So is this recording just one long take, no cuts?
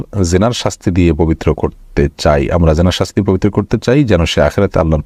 yes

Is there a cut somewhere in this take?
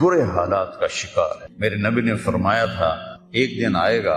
yes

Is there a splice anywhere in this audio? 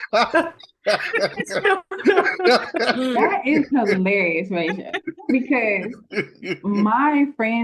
no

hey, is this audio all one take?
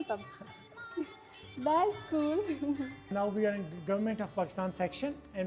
no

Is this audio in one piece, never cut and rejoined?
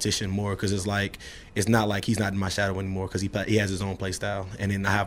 yes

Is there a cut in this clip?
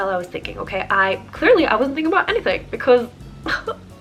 no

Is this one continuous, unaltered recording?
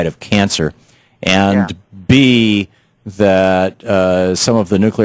no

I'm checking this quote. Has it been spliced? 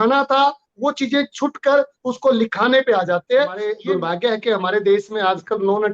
yes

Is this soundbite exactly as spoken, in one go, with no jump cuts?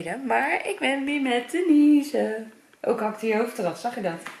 yes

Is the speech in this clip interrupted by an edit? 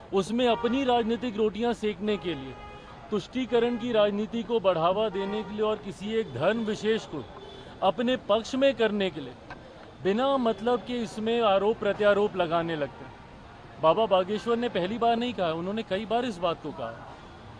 no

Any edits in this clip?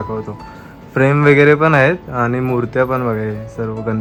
no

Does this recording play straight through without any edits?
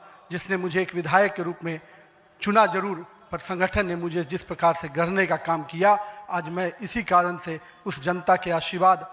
yes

